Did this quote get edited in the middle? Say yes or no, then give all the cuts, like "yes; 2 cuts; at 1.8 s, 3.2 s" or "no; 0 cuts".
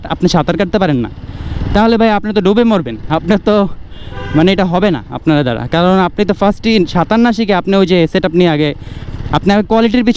no; 0 cuts